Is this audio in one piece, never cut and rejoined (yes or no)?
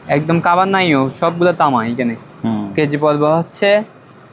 yes